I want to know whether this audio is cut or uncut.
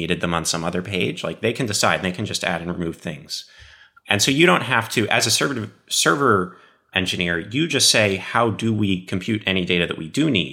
uncut